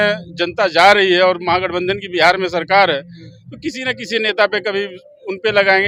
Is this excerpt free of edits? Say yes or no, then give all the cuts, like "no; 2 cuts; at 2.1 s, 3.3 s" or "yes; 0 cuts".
yes; 0 cuts